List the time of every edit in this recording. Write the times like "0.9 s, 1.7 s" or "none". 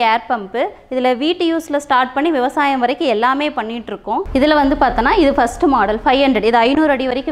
4.3 s